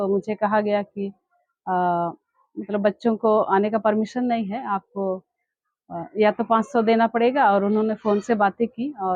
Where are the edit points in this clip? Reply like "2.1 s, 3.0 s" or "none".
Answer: none